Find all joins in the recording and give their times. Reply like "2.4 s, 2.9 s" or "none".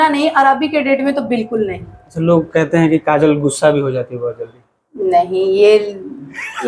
none